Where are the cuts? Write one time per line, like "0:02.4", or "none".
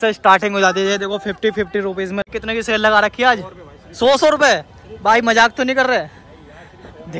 0:02.3